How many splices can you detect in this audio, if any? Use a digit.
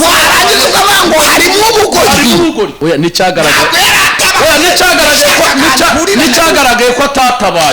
1